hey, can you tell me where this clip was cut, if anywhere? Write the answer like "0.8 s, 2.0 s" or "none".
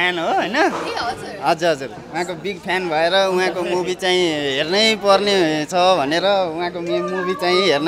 none